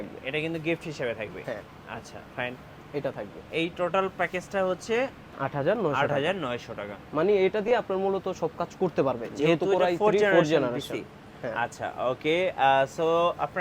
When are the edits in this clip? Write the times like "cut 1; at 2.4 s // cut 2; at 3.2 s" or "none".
none